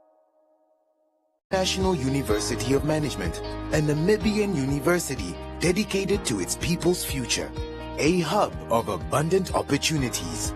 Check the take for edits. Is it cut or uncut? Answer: cut